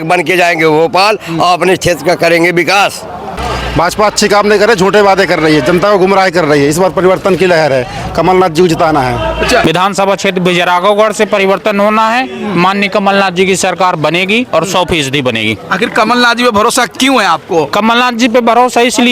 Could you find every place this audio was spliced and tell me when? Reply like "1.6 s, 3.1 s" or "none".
3.4 s, 9.6 s